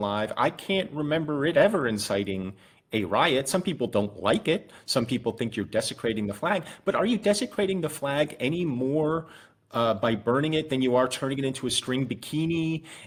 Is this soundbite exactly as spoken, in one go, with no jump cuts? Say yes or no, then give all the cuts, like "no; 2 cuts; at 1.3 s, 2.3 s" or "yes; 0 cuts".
yes; 0 cuts